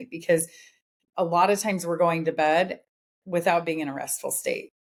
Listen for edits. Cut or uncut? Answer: uncut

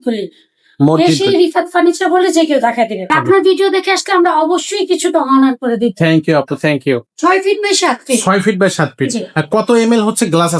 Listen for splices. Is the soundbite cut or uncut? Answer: cut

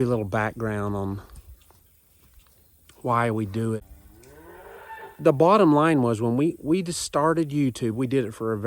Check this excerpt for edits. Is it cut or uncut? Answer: cut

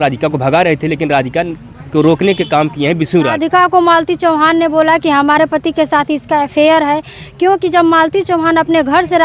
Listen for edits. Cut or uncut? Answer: cut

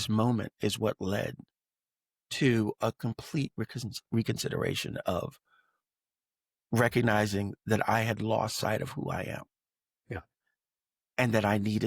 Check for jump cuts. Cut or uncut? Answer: uncut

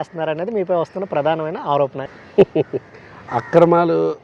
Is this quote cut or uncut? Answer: cut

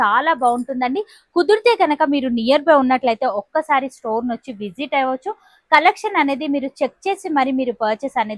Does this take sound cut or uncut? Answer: uncut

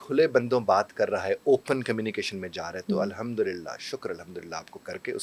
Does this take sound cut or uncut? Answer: uncut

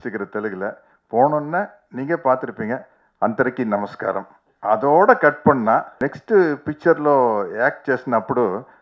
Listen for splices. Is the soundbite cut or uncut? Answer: cut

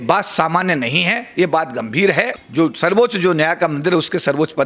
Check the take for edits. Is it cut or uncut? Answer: cut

